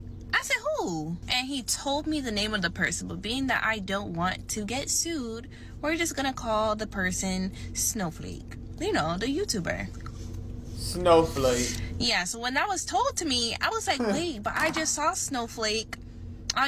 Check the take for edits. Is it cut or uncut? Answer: cut